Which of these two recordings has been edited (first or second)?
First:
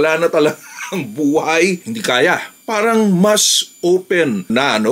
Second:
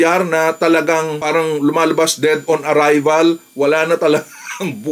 first